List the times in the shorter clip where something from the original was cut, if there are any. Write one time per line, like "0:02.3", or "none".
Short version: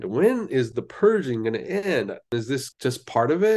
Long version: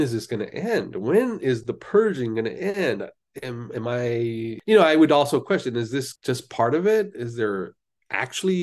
0:02.3